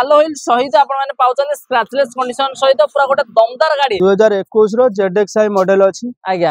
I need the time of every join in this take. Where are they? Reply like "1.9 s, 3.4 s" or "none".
3.9 s